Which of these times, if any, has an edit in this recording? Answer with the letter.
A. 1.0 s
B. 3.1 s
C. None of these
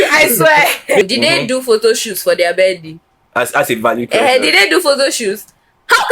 A